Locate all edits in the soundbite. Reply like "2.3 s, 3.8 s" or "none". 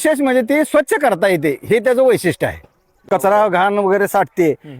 3.0 s